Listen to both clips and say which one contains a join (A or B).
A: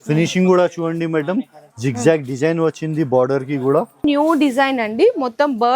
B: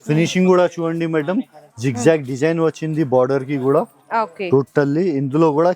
A